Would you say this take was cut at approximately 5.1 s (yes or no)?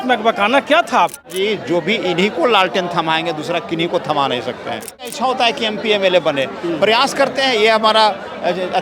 yes